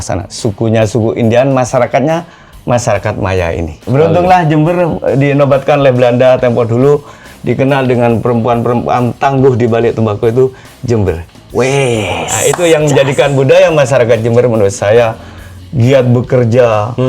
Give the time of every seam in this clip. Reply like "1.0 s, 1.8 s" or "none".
3.9 s